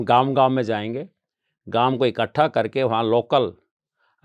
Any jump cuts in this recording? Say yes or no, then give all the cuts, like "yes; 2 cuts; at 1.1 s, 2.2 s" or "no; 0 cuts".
no; 0 cuts